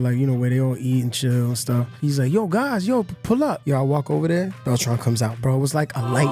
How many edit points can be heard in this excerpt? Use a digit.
2